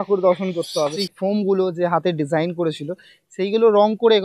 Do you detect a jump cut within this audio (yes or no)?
yes